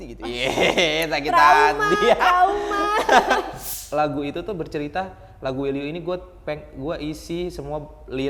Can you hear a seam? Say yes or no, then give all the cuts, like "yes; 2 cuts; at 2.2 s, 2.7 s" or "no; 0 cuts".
yes; 1 cut; at 3.6 s